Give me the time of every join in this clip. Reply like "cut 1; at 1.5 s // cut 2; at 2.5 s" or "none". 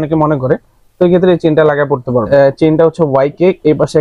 cut 1; at 2.3 s